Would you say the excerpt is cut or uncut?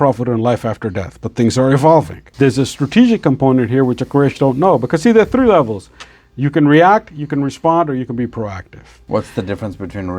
cut